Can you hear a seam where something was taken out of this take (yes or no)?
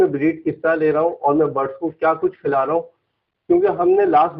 no